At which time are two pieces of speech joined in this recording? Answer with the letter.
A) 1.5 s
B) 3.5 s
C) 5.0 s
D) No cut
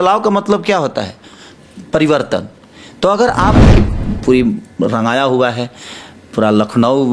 B